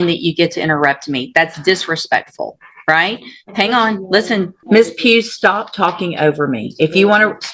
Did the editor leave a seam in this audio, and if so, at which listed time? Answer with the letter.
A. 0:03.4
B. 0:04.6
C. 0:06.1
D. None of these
B